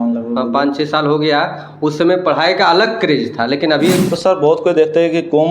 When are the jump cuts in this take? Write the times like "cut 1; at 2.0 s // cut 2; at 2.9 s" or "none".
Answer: cut 1; at 4.1 s